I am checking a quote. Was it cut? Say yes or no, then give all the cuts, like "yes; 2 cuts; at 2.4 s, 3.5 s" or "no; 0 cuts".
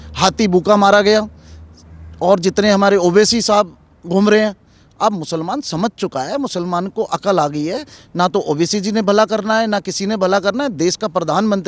no; 0 cuts